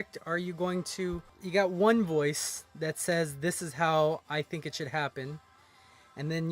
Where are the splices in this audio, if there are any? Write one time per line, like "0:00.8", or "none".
0:01.1